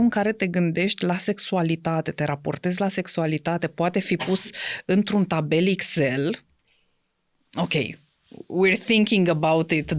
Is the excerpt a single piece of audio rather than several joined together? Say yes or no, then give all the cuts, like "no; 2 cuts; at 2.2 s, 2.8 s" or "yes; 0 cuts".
yes; 0 cuts